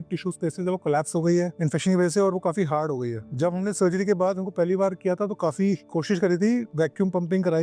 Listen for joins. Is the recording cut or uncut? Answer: uncut